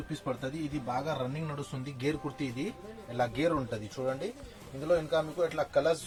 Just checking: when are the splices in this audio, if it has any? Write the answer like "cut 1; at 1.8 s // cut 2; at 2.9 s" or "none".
none